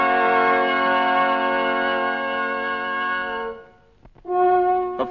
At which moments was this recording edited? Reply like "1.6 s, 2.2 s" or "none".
1.5 s